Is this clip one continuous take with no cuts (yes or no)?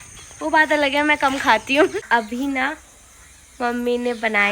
no